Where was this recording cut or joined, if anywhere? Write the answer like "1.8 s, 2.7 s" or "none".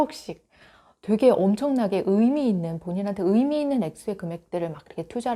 none